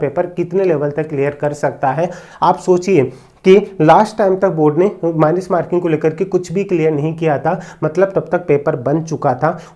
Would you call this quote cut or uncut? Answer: uncut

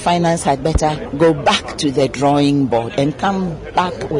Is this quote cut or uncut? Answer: cut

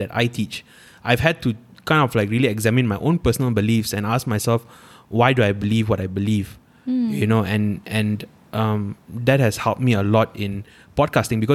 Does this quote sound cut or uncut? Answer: uncut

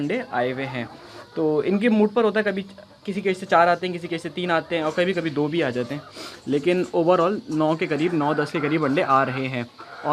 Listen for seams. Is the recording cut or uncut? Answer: uncut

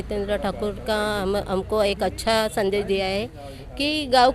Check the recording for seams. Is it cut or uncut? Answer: uncut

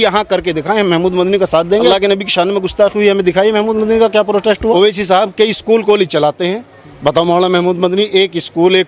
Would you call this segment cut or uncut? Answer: cut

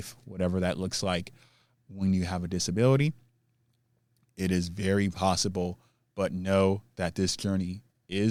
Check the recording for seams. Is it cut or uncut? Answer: uncut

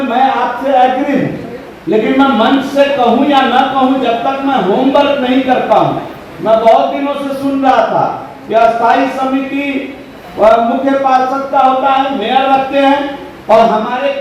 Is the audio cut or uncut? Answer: uncut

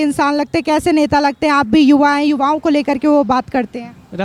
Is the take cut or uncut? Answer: uncut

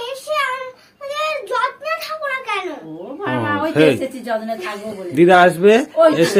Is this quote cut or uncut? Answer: uncut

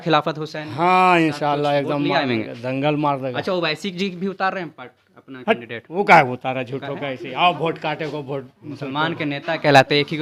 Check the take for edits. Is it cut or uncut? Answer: uncut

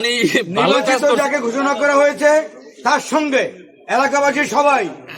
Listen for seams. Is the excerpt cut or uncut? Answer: cut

